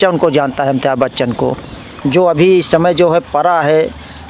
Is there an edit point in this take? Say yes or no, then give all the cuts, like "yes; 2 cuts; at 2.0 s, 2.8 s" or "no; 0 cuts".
yes; 1 cut; at 1.9 s